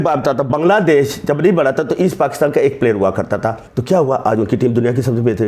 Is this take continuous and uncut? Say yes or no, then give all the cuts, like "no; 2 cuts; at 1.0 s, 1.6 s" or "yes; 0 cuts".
no; 1 cut; at 3.7 s